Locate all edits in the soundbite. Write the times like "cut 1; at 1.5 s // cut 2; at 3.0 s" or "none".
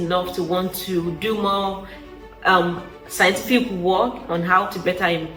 none